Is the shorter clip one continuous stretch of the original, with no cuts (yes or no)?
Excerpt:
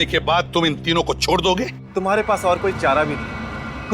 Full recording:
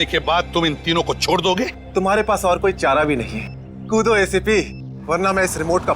yes